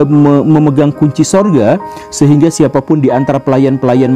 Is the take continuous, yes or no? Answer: yes